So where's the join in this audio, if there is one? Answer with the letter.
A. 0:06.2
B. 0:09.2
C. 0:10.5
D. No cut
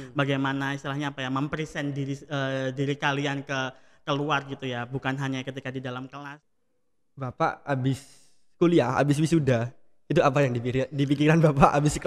A